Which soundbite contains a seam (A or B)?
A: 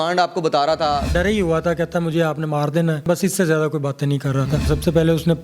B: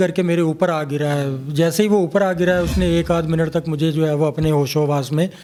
A